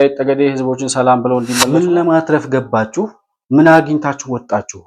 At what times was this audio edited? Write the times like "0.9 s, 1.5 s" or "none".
1.7 s